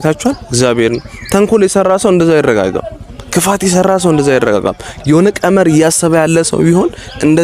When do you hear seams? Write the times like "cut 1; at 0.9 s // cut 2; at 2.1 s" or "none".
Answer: none